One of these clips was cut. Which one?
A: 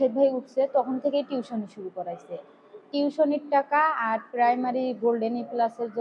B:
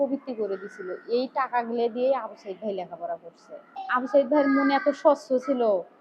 B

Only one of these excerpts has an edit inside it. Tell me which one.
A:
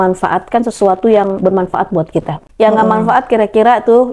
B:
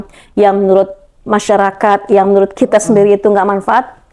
A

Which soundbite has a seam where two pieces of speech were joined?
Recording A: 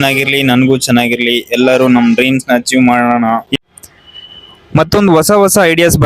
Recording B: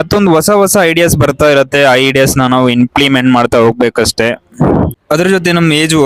A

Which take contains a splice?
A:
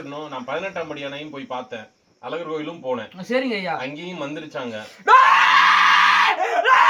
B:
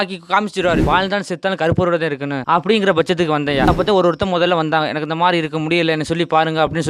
B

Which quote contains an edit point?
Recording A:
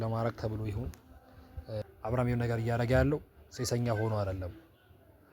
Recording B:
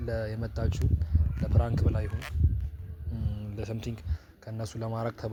A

